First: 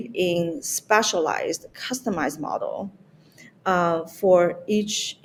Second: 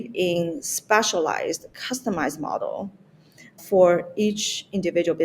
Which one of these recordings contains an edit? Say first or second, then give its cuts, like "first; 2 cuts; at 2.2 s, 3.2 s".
second; 1 cut; at 3.6 s